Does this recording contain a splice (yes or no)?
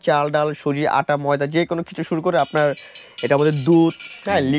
no